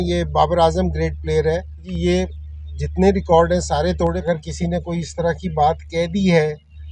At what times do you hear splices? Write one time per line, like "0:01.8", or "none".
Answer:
0:01.9
0:04.2